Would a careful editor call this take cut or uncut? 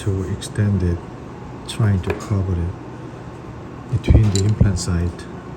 uncut